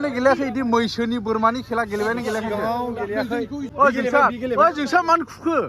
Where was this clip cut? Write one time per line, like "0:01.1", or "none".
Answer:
0:03.7

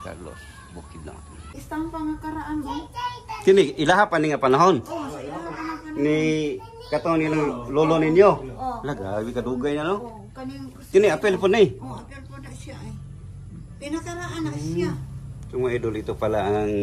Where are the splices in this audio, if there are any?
0:01.6

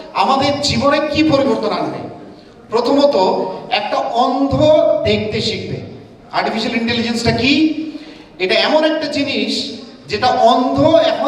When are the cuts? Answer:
none

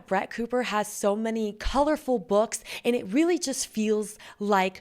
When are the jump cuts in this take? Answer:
none

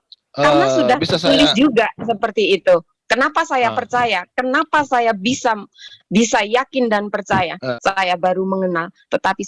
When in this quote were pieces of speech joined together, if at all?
0:07.6

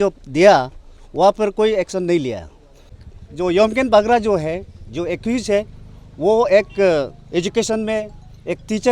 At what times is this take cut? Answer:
0:03.1

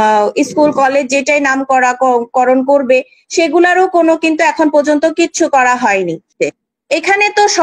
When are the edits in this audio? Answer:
0:06.3

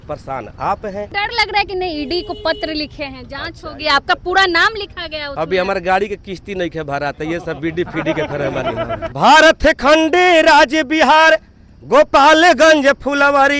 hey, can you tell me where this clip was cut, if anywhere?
0:01.1
0:09.1

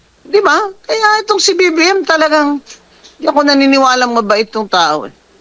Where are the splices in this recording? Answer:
none

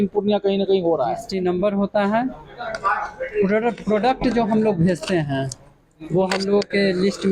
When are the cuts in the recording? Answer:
0:01.3

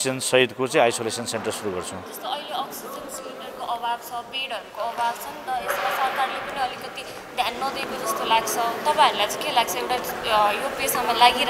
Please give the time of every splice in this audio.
none

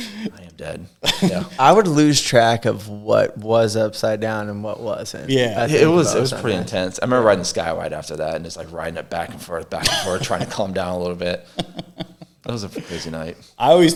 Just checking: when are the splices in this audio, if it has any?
none

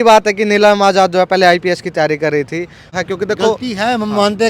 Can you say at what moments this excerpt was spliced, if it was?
0:02.9

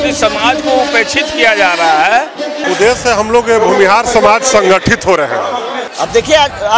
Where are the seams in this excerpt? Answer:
0:02.6
0:05.8

